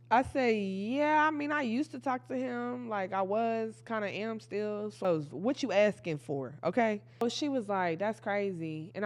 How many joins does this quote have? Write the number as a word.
two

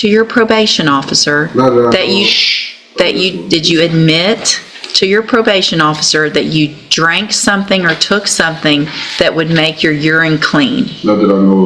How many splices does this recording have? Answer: zero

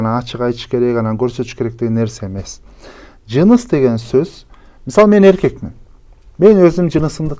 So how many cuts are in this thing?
zero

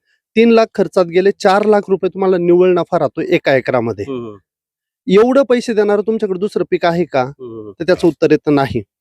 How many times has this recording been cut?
zero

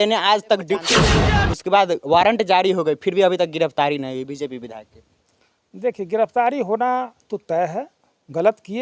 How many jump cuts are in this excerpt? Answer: one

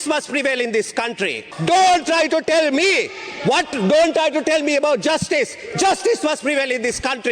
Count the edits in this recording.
one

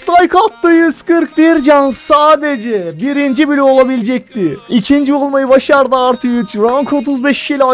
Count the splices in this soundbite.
one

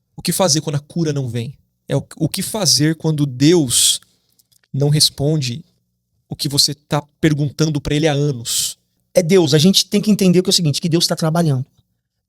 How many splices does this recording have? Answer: one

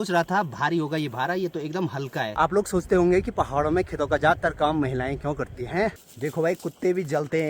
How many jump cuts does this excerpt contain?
two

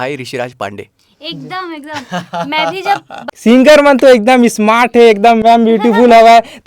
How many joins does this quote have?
one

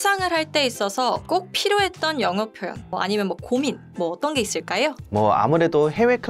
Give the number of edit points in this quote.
three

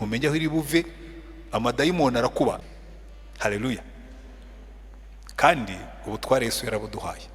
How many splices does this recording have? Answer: one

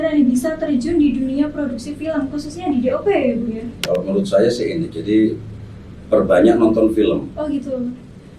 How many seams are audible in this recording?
one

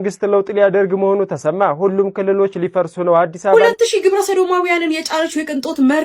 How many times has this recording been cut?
one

